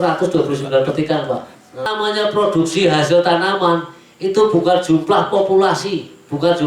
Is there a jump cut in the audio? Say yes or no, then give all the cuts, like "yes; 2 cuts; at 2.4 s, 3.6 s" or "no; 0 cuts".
yes; 1 cut; at 1.8 s